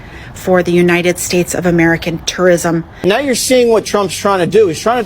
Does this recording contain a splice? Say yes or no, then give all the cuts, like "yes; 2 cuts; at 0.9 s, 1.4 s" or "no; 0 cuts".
yes; 1 cut; at 2.9 s